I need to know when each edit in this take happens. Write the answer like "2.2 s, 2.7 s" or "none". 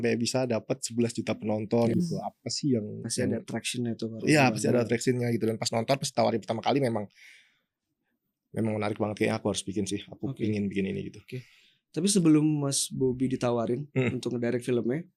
none